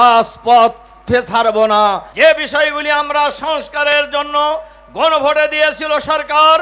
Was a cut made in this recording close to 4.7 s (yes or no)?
no